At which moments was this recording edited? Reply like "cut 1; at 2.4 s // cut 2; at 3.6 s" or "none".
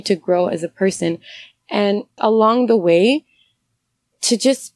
cut 1; at 2.1 s